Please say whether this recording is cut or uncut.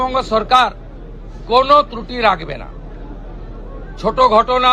uncut